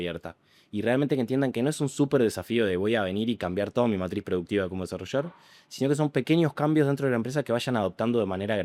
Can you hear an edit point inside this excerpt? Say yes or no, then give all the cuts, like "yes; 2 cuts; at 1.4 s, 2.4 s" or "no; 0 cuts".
no; 0 cuts